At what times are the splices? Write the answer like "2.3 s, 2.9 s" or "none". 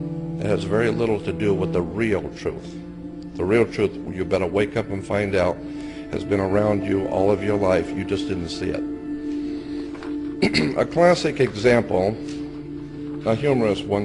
11.3 s